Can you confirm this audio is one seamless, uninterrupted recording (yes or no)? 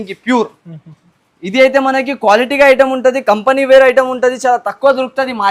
yes